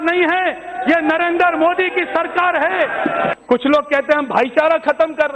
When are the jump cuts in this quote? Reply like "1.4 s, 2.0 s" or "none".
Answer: 3.3 s

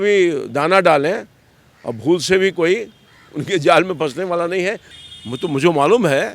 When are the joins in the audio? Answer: 4.9 s

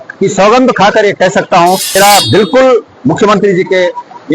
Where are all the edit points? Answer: 1.9 s

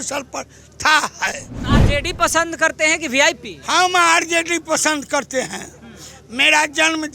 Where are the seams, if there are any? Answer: 1.6 s

